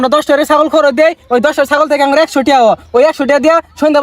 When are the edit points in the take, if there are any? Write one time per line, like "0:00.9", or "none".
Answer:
none